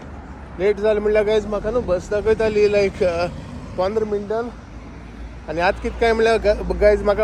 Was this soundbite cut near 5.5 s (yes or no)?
no